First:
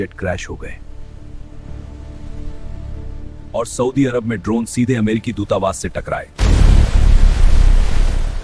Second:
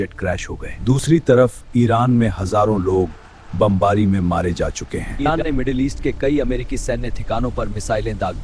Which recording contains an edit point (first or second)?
second